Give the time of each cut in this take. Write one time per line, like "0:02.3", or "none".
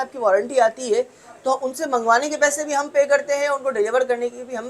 none